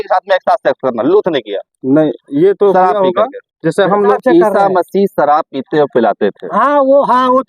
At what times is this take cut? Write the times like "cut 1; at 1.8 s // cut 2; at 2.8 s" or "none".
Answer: cut 1; at 4.1 s

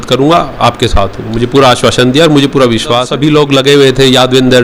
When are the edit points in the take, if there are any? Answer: cut 1; at 3.1 s

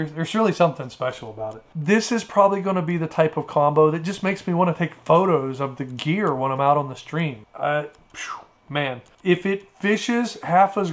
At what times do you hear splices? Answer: cut 1; at 1.7 s // cut 2; at 7.4 s

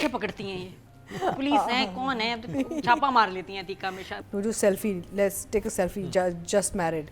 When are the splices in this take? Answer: cut 1; at 4.0 s

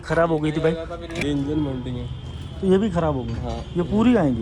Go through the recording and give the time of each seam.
cut 1; at 1.2 s

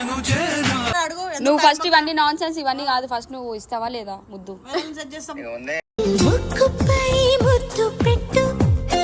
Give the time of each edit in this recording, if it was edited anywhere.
cut 1; at 0.9 s

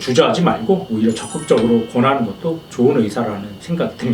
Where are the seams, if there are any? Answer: none

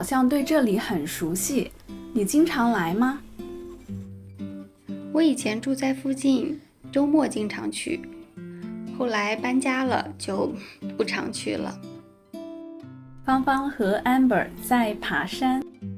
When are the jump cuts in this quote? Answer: cut 1; at 3.2 s // cut 2; at 4.6 s // cut 3; at 11.8 s // cut 4; at 13.2 s

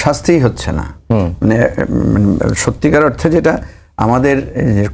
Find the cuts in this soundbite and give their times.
none

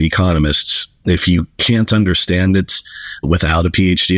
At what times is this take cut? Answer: none

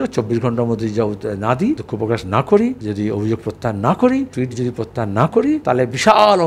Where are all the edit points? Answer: cut 1; at 1.9 s // cut 2; at 2.8 s // cut 3; at 4.3 s // cut 4; at 5.6 s

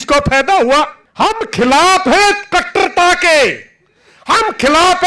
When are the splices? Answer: cut 1; at 1.0 s

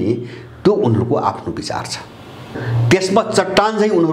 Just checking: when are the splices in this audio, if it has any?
cut 1; at 2.6 s

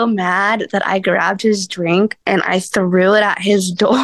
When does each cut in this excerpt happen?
cut 1; at 2.2 s

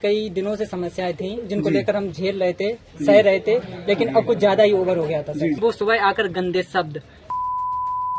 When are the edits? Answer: cut 1; at 5.6 s

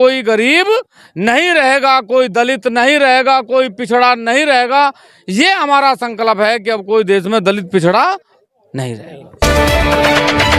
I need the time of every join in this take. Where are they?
cut 1; at 9.4 s

